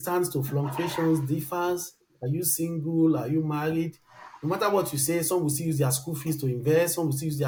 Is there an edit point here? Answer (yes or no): no